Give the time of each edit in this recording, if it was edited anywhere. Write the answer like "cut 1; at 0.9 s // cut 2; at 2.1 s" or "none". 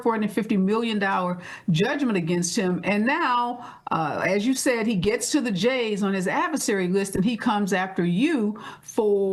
none